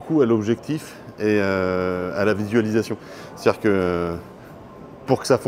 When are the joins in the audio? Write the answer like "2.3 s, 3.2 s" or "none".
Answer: none

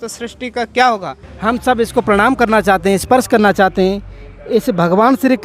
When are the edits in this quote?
1.2 s

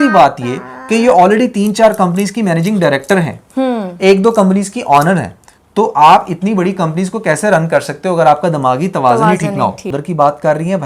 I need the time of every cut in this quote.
9.9 s

